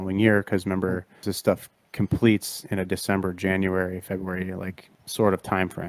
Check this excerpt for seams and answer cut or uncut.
cut